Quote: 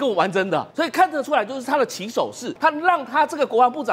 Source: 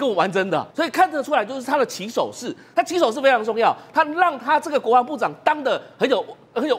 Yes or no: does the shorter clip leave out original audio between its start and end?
yes